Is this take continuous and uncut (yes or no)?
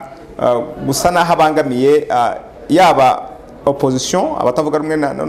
yes